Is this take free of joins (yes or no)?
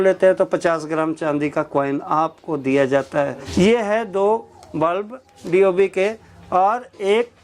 no